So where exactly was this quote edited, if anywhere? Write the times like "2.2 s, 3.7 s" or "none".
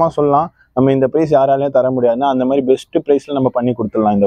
none